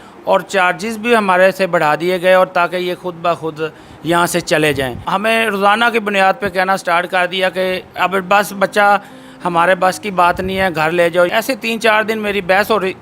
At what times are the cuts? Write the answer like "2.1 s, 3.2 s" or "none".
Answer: 5.1 s, 11.3 s